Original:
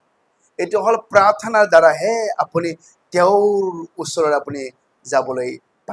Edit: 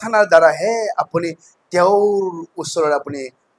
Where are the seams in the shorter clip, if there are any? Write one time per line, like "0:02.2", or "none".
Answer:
none